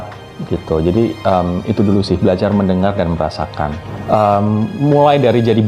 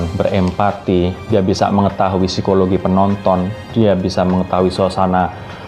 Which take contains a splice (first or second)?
first